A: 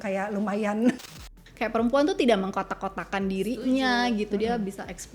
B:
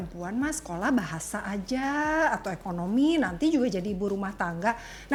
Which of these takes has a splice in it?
A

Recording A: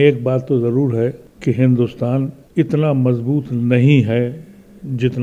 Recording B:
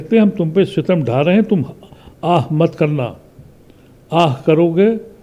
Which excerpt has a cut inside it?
A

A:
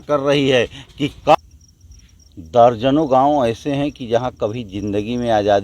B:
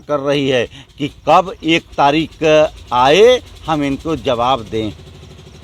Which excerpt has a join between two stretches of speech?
A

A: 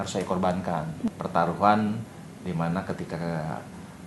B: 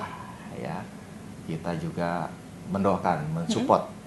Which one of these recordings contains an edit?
A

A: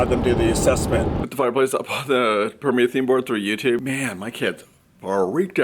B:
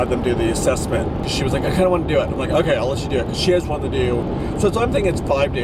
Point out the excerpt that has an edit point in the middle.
A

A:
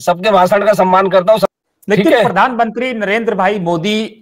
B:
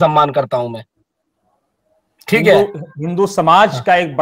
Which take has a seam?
A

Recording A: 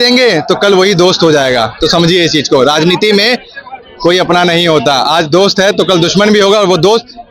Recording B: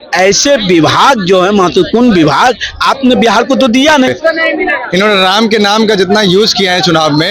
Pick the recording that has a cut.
B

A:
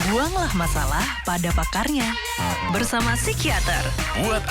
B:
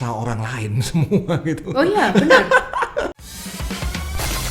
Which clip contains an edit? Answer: B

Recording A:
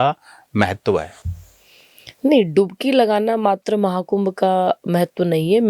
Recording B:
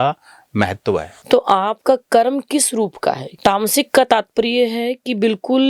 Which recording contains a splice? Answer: B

